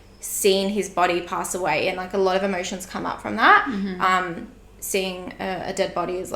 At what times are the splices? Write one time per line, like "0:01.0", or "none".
none